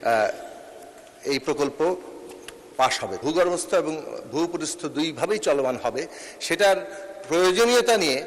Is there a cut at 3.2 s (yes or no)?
yes